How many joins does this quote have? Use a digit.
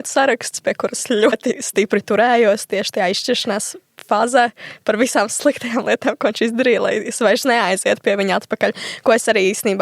1